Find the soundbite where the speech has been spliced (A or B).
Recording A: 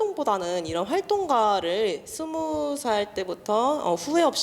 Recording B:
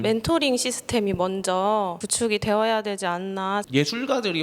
B